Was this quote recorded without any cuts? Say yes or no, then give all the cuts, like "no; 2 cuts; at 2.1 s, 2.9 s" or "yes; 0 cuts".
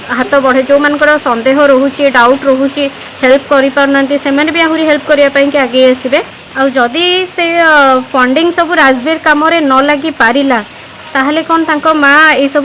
no; 1 cut; at 6.4 s